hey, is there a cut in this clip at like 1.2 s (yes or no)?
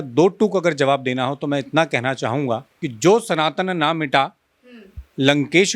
no